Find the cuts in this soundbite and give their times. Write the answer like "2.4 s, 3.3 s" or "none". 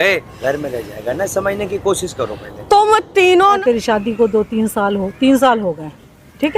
3.6 s